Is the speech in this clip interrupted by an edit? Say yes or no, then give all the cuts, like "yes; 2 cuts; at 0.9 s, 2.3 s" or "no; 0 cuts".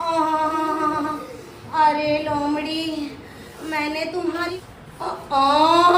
yes; 1 cut; at 4.5 s